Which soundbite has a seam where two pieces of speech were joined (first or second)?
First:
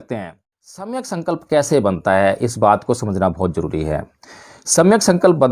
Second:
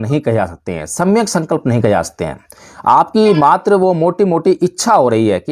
first